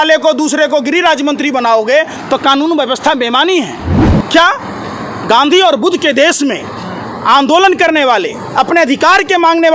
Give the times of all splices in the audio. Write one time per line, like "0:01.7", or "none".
0:04.0